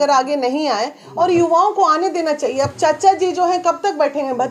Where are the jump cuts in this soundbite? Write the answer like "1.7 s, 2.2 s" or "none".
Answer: none

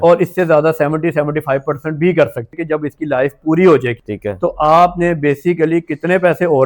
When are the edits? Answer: 2.5 s

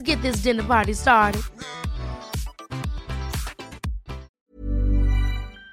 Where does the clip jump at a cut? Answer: 4.3 s

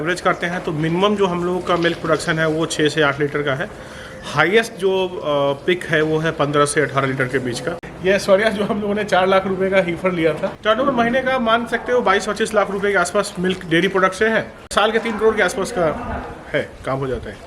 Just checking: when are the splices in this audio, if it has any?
7.9 s, 10.5 s, 14.7 s

